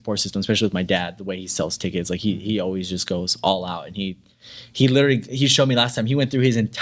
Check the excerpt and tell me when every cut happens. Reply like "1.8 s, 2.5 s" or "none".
none